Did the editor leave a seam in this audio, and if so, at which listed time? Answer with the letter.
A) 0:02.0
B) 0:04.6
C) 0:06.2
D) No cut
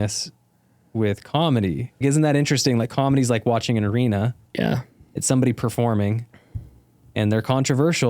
A